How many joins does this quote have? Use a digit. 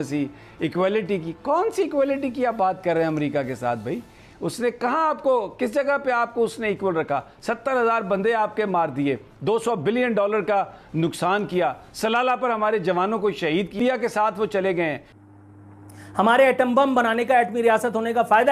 2